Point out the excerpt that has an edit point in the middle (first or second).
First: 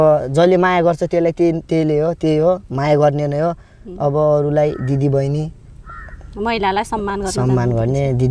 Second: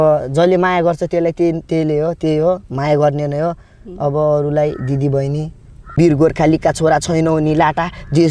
second